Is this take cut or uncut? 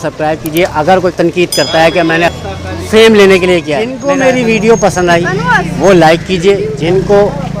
cut